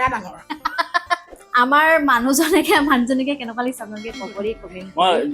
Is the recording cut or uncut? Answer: cut